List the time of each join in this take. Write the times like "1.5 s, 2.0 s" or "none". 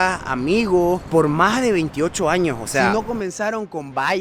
2.9 s

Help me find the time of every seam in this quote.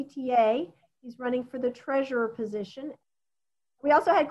3.0 s

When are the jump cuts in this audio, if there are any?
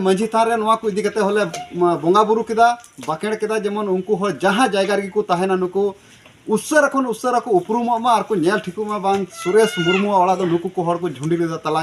none

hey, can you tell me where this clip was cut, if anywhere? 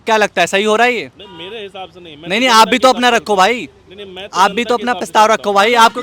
none

